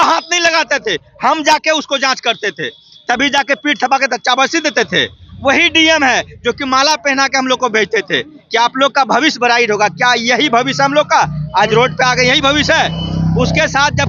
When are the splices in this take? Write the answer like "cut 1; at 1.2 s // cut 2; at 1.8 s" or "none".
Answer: none